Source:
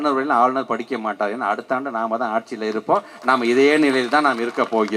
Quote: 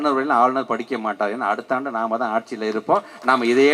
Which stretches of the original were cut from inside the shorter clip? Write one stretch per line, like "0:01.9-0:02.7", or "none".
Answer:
none

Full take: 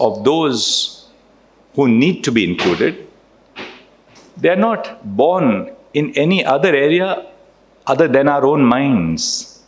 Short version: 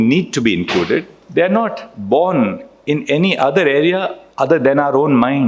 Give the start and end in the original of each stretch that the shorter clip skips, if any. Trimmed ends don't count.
0:03.1-0:04.2
0:07.3-0:07.7

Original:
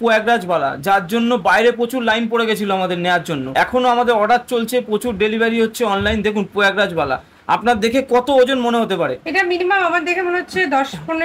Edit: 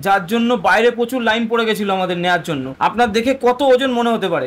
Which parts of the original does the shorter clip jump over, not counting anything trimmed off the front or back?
0:03.4-0:07.3

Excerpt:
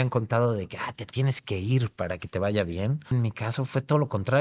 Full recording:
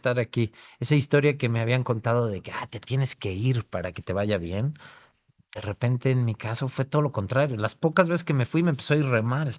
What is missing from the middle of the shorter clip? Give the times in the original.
0:04.9-0:06.2

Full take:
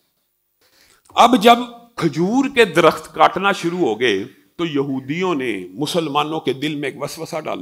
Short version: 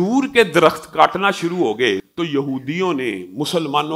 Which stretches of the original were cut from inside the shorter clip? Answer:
0:04.3-0:04.5

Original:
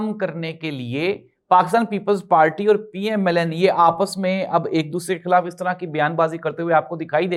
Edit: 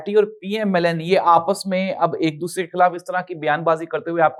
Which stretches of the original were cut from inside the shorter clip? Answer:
none

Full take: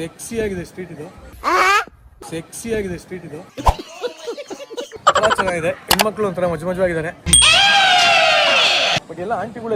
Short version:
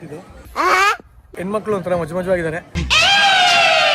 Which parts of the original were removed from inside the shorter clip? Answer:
0:02.4-0:06.0

